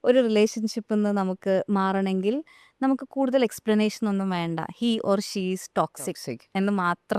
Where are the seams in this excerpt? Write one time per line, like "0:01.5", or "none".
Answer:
none